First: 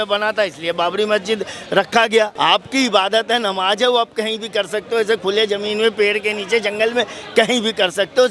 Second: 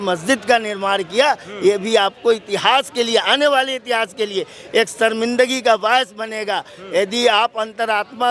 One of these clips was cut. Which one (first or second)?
first